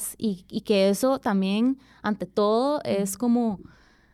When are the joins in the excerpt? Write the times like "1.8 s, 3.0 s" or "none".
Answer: none